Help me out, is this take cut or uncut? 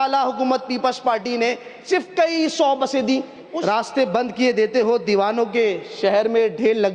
cut